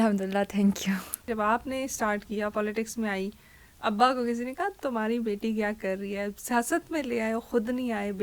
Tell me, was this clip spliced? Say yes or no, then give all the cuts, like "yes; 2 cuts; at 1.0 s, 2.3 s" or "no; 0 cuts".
yes; 1 cut; at 1.2 s